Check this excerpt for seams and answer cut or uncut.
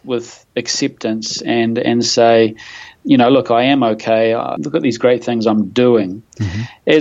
cut